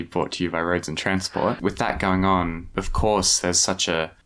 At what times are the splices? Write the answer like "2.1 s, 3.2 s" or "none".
1.6 s, 2.7 s